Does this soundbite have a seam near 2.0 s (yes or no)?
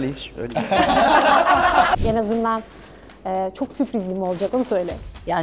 yes